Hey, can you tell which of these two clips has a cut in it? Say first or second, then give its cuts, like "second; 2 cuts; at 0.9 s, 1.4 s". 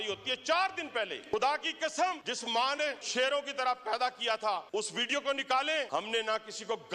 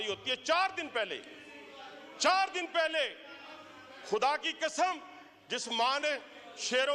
first; 4 cuts; at 1.2 s, 2.7 s, 4.7 s, 5.9 s